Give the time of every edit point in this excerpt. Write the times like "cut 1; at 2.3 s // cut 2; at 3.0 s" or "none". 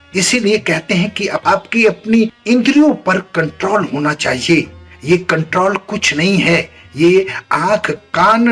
cut 1; at 2.4 s